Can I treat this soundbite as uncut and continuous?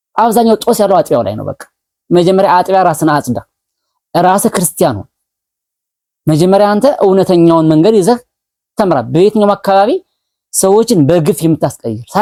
yes; 0 cuts

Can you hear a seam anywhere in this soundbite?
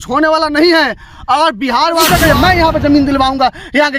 yes; 1 cut; at 2.1 s

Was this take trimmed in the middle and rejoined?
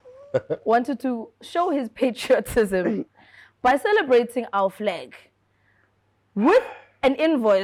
no; 0 cuts

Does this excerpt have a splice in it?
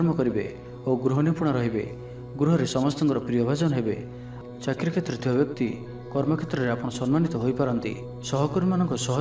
no; 0 cuts

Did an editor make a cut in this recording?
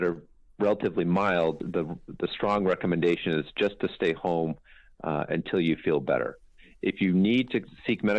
yes; 1 cut; at 1.6 s

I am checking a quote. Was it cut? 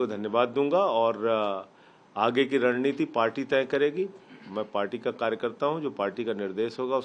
no; 0 cuts

